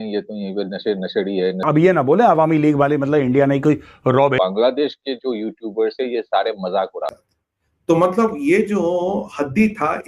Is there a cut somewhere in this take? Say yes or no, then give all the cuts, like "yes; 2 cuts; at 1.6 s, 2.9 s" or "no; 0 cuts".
yes; 3 cuts; at 1.6 s, 4.3 s, 7.1 s